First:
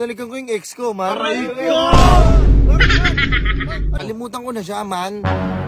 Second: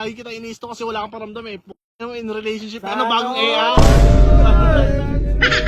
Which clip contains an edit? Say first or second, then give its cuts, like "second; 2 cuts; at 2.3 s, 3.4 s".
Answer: first; 1 cut; at 4.0 s